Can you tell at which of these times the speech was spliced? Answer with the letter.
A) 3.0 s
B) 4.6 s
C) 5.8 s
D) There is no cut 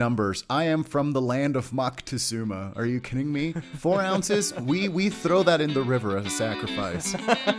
D